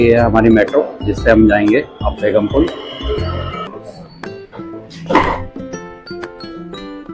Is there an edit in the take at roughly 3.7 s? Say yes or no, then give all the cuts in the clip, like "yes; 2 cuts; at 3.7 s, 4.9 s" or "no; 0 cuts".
yes; 1 cut; at 3.7 s